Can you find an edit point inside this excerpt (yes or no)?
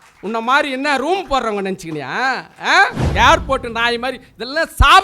yes